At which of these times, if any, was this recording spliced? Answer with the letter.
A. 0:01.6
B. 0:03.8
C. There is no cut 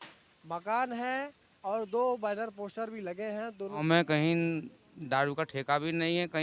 B